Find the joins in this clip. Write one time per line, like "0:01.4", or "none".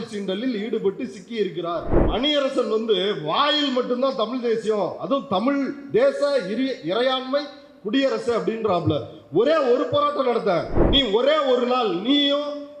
0:02.0
0:10.8